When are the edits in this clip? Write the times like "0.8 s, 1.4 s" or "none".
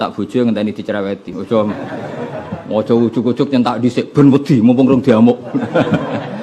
1.3 s